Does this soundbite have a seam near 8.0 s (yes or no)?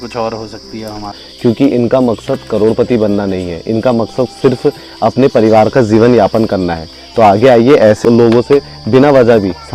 yes